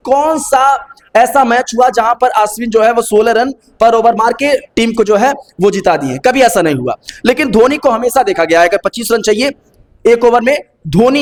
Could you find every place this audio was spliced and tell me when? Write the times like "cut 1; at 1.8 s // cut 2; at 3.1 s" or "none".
none